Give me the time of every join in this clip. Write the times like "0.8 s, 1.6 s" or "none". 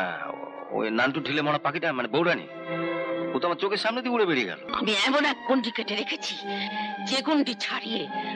4.7 s